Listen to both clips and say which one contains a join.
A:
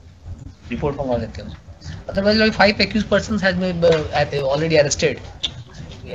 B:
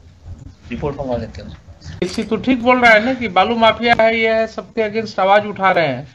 B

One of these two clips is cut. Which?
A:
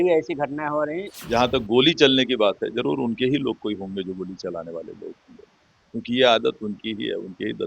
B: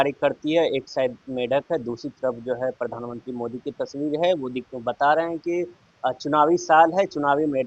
A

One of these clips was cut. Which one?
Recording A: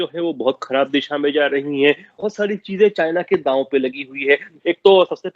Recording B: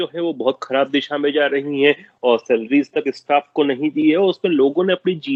A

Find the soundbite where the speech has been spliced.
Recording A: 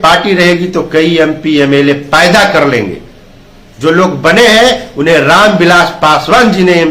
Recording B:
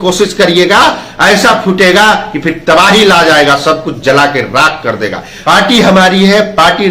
B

